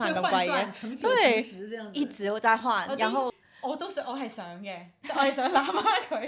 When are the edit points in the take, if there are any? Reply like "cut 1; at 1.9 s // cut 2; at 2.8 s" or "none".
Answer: cut 1; at 3.4 s